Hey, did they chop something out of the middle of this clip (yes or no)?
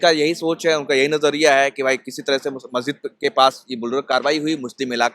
no